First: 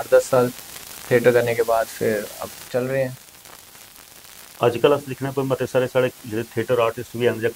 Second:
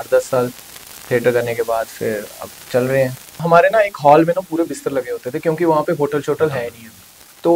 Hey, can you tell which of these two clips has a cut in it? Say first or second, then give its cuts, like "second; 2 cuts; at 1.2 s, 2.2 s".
second; 1 cut; at 3.4 s